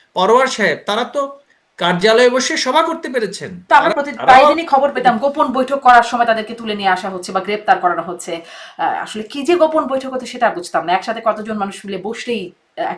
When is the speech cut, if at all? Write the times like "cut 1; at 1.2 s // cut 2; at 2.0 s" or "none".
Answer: cut 1; at 3.5 s